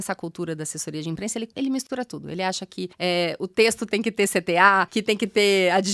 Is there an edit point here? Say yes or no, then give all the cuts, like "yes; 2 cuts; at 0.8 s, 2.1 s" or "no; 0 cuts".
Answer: yes; 3 cuts; at 1.5 s, 2.9 s, 4.9 s